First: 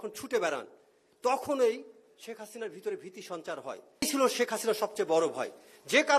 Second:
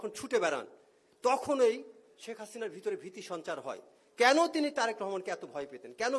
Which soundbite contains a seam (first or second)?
first